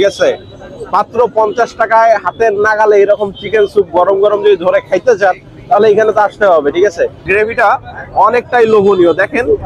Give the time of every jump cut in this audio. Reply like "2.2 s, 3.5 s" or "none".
7.2 s